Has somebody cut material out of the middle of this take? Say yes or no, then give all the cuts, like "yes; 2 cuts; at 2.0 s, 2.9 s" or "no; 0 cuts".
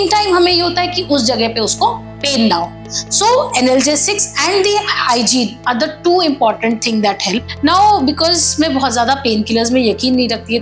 yes; 1 cut; at 7.5 s